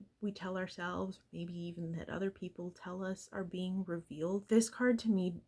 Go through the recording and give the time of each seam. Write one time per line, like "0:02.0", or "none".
0:04.4

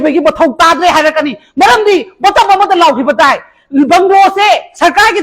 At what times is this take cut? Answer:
none

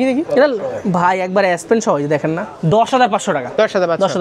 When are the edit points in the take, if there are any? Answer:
0:02.5

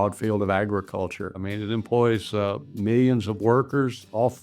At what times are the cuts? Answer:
0:01.4

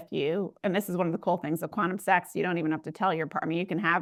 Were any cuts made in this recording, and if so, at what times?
none

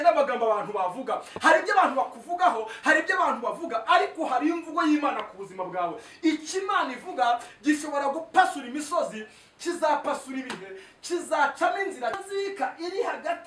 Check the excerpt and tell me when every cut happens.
0:12.2

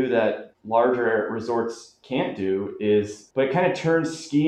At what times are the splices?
0:03.2

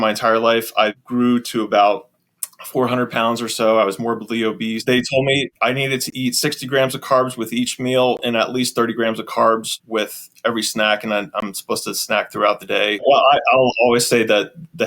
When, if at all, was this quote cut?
0:01.0
0:04.8
0:05.5
0:09.7
0:13.1

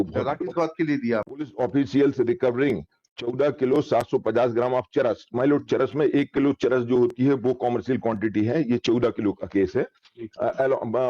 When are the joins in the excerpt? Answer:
0:01.3

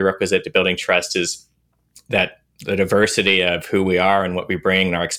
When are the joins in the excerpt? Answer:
none

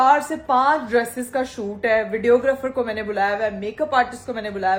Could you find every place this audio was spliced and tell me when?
none

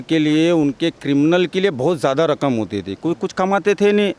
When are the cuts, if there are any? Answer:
none

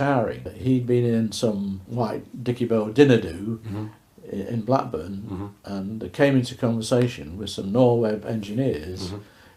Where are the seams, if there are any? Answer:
none

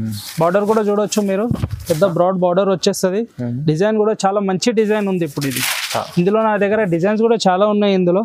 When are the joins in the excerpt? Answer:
none

